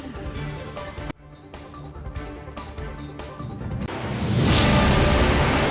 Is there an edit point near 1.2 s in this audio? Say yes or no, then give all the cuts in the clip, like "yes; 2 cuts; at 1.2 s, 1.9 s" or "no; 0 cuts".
yes; 2 cuts; at 1.2 s, 3.6 s